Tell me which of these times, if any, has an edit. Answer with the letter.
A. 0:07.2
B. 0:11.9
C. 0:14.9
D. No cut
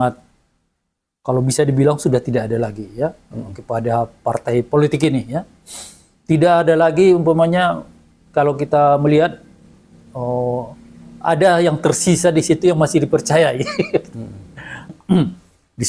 C